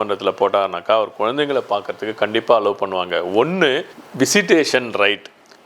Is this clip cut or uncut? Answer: uncut